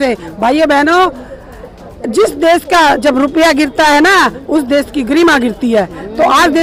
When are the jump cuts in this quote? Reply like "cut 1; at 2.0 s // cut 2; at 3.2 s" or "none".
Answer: none